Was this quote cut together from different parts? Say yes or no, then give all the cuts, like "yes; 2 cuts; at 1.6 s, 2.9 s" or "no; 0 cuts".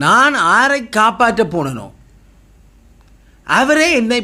no; 0 cuts